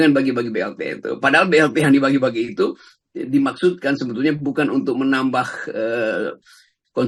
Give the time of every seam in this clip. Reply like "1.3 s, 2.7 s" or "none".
none